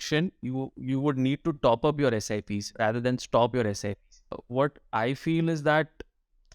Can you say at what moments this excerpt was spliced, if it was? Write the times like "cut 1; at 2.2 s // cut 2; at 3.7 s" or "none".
cut 1; at 4.4 s